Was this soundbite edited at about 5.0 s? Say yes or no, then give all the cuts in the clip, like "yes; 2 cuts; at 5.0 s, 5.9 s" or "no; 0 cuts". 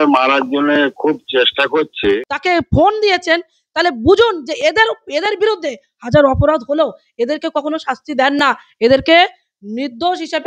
no; 1 cut; at 2.3 s